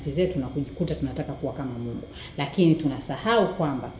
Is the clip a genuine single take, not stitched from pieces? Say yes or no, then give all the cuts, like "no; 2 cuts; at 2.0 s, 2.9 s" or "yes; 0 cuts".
yes; 0 cuts